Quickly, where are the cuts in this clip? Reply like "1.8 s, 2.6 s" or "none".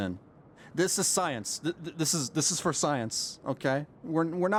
none